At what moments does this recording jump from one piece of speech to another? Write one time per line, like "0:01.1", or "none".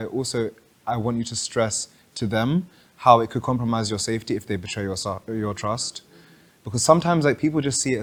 none